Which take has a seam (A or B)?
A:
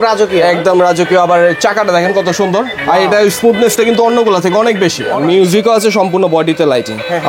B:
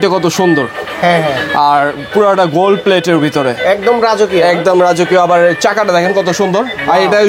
A